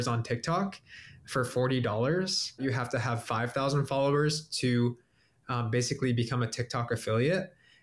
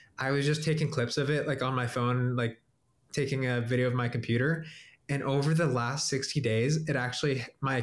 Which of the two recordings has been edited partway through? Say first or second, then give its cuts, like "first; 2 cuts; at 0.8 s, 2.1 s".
first; 1 cut; at 2.6 s